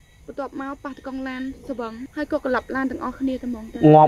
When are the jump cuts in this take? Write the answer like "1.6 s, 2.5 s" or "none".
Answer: 2.1 s